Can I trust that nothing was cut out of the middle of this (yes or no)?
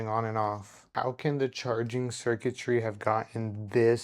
no